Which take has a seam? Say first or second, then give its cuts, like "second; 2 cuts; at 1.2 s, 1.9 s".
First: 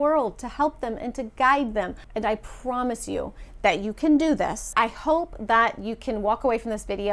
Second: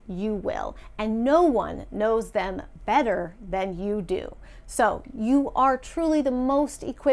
first; 2 cuts; at 2.0 s, 4.7 s